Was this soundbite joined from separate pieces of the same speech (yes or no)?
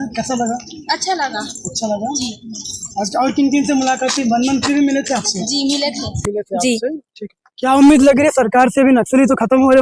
no